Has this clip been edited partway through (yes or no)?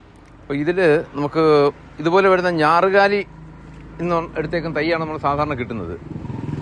no